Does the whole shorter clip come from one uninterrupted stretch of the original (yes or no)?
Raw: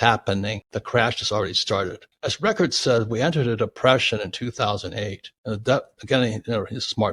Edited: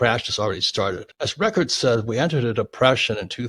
no